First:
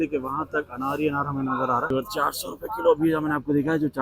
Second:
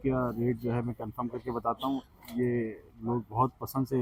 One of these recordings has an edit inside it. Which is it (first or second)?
first